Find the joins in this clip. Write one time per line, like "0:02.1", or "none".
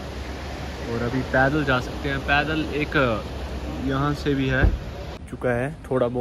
0:05.2